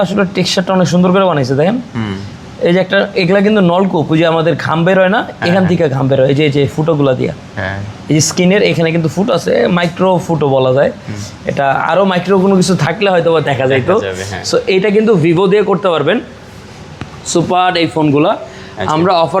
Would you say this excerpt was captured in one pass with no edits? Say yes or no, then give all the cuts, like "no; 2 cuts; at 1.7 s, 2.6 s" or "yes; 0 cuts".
yes; 0 cuts